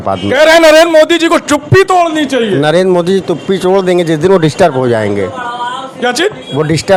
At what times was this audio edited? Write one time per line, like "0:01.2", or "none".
none